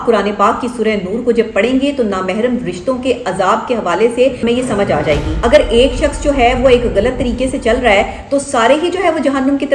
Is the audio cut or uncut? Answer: cut